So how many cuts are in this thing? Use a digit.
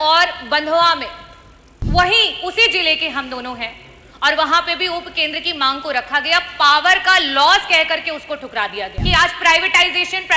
1